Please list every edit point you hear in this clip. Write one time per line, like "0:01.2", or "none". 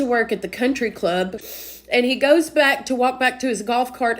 0:01.5